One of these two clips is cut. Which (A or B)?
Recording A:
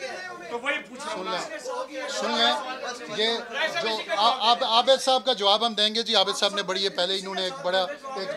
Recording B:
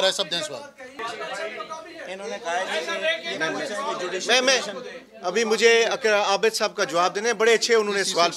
B